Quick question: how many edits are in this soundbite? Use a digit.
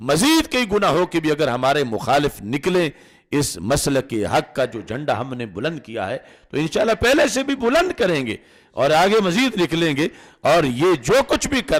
0